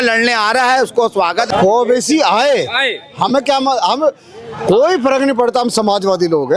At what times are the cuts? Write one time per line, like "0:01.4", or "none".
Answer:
0:01.5